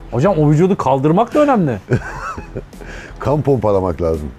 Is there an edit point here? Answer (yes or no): no